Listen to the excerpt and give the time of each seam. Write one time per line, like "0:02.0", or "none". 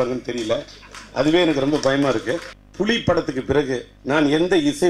0:02.6
0:03.9

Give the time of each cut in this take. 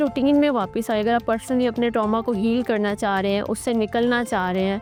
none

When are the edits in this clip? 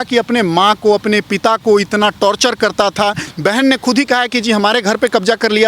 0:03.2

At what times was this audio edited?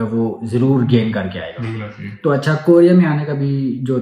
none

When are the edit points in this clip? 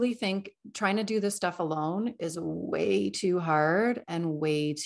none

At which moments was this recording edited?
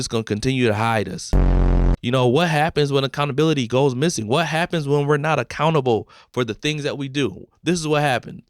0:01.6

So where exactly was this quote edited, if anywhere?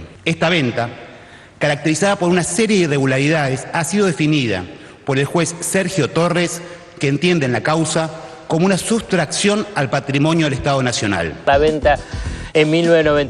0:11.3

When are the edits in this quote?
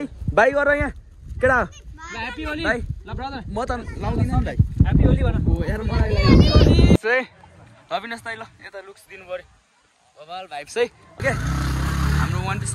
0:07.0
0:11.2

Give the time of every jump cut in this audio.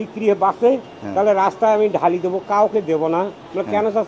none

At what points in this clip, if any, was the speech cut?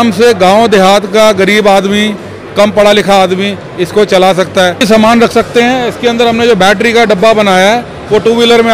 0:04.8

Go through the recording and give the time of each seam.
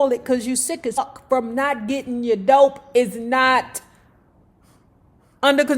0:01.0

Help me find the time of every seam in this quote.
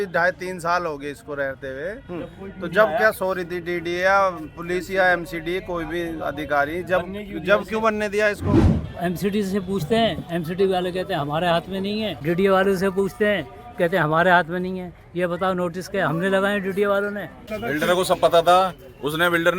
0:08.9
0:12.2
0:17.4

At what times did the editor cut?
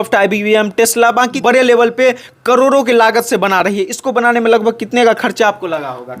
0:01.4

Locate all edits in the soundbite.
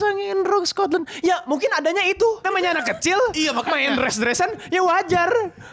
0:02.4

